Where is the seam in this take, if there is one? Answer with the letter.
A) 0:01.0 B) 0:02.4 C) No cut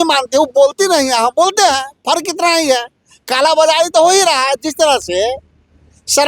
C